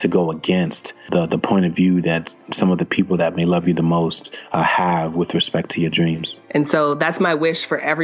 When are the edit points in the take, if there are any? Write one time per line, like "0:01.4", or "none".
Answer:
0:01.0
0:06.3

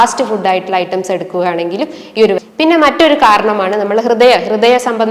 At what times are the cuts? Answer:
0:02.4

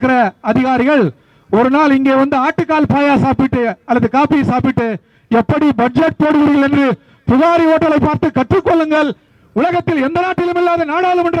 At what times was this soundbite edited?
0:09.2

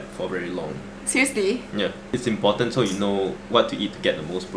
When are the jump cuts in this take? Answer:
0:02.0
0:03.4

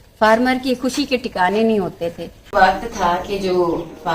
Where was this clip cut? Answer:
0:02.5

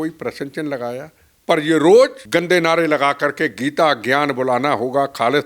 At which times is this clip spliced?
0:02.2

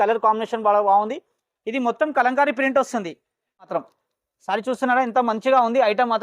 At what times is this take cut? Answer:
0:03.7

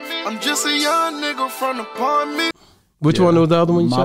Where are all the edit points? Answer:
0:02.7

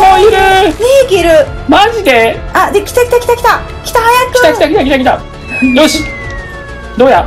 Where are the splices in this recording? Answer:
0:05.2

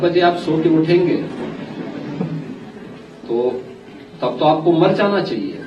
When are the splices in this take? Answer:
none

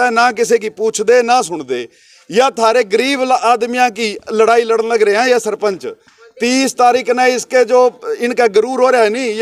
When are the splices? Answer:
none

